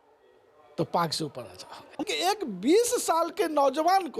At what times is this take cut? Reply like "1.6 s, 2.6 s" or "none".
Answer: 2.1 s